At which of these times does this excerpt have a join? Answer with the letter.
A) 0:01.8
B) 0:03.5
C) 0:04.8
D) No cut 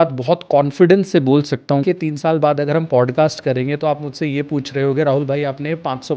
A